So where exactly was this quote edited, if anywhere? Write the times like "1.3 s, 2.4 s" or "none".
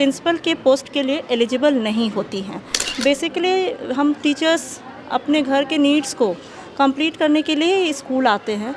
2.9 s